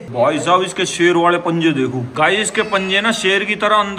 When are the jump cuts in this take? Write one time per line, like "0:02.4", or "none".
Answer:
0:02.0